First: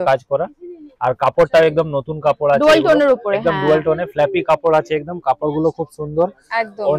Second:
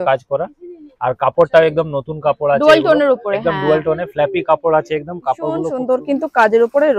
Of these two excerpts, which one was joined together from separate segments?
second; 1 cut; at 5.7 s

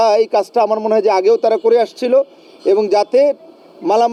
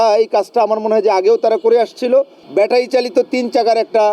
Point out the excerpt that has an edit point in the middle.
second; 1 cut; at 2.4 s

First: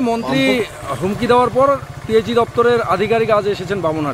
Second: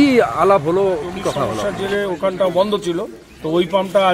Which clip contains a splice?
second; 1 cut; at 1.6 s

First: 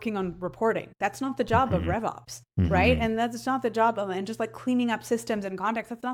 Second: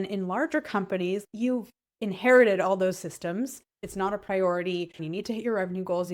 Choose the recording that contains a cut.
second; 3 cuts; at 1.2 s, 3.8 s, 5.0 s

